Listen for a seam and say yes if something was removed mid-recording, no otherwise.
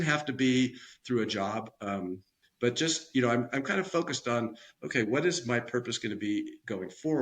yes